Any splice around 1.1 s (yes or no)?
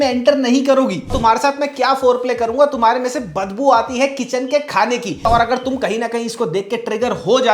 yes